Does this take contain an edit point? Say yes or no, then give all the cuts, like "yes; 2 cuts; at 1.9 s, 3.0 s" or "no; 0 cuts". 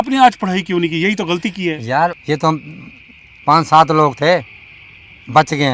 yes; 1 cut; at 2.2 s